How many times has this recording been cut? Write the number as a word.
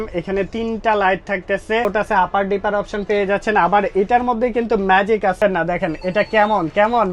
two